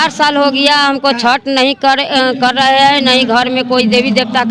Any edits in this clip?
no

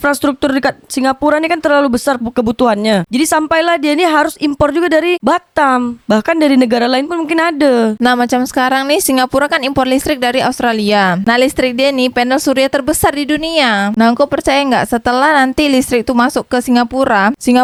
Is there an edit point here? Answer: no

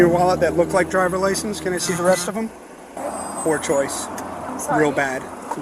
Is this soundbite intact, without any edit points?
no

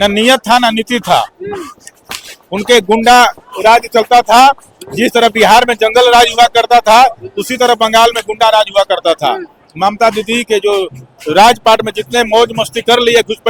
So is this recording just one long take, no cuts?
yes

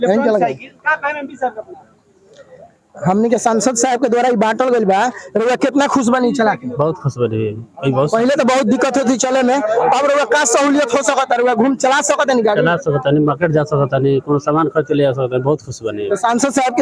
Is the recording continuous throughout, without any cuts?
yes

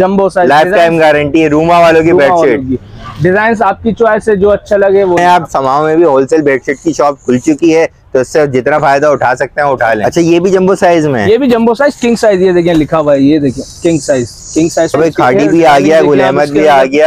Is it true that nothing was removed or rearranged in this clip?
no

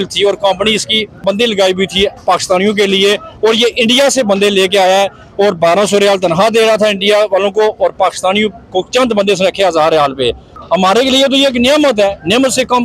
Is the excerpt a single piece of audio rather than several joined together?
no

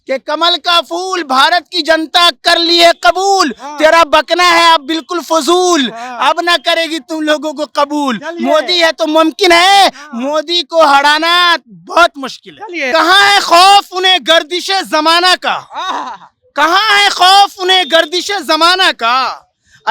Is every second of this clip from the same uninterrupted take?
no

